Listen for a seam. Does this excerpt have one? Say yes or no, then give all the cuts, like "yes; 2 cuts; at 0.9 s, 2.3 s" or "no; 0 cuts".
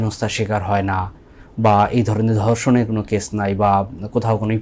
no; 0 cuts